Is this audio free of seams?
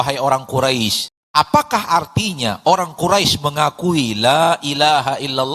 no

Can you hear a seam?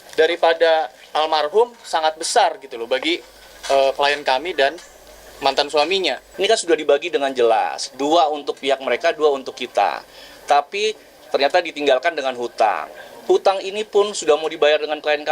yes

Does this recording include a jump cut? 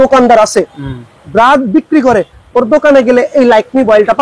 no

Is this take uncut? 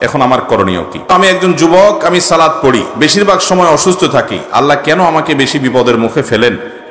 no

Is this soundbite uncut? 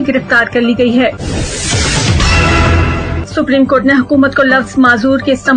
no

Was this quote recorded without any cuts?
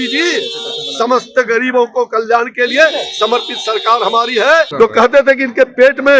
no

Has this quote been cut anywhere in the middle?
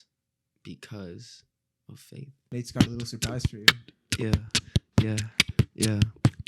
yes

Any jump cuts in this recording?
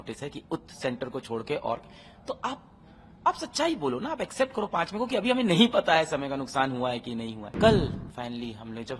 yes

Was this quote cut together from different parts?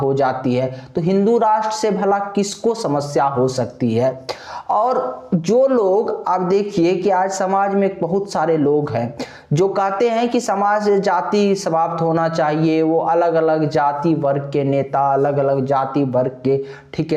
no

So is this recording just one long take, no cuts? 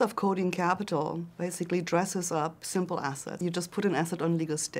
no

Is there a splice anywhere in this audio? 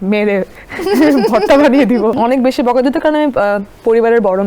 yes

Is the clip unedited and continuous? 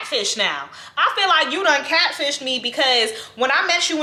yes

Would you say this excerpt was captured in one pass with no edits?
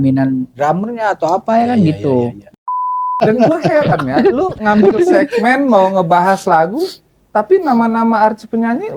no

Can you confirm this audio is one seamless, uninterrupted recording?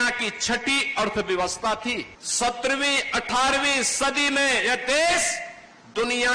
no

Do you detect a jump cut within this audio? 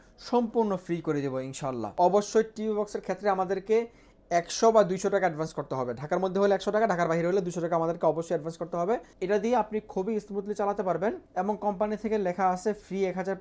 yes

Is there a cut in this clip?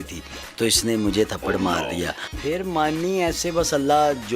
yes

